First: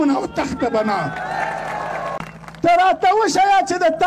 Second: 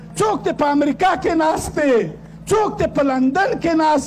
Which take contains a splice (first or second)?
first